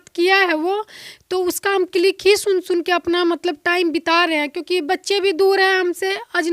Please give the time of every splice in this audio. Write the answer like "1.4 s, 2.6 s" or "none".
none

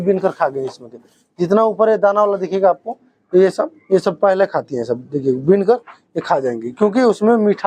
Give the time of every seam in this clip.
none

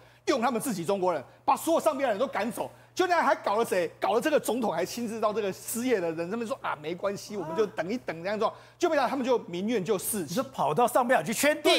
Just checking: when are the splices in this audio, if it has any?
none

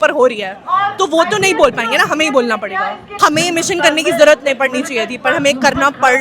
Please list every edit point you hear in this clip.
3.0 s

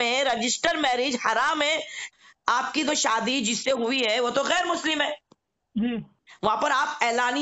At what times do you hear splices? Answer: 2.1 s

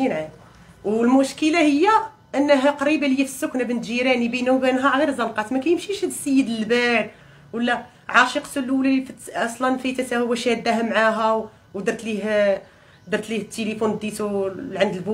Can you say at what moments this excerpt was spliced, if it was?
none

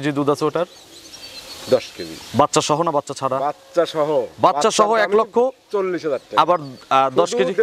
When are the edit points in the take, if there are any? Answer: none

